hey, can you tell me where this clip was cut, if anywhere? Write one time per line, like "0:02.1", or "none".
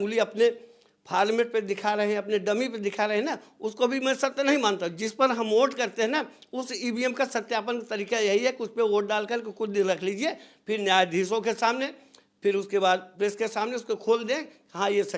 none